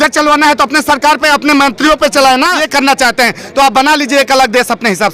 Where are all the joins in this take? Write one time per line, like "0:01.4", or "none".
0:02.6